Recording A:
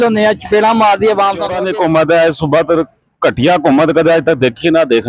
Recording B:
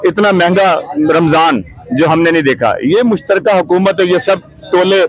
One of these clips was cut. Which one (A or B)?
A